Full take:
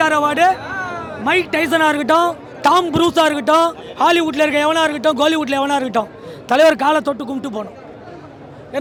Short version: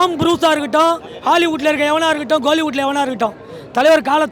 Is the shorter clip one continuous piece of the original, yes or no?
yes